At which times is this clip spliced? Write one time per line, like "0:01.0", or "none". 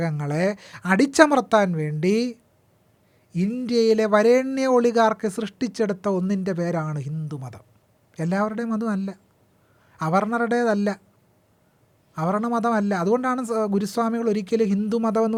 none